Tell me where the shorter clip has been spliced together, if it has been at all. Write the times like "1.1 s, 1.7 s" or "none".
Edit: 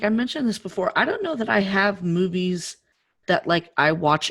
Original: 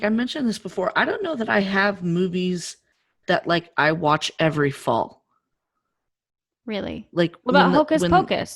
none